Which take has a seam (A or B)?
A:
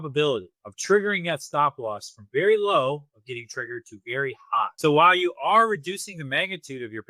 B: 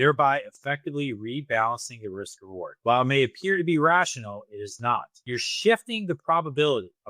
B